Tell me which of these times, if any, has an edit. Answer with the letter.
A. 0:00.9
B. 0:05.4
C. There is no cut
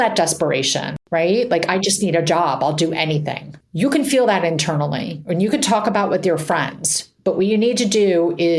A